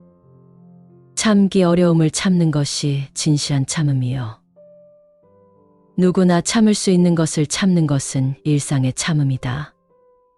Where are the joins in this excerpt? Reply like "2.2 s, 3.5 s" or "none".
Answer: 0.9 s, 9.7 s